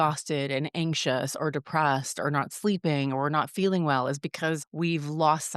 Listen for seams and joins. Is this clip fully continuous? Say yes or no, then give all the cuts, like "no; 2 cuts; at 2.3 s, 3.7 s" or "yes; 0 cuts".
no; 1 cut; at 4.7 s